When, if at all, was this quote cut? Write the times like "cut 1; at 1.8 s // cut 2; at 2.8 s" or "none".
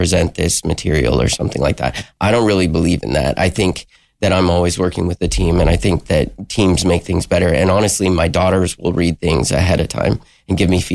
none